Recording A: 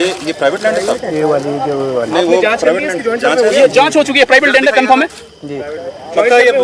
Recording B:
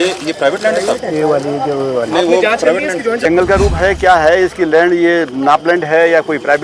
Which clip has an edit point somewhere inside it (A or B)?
B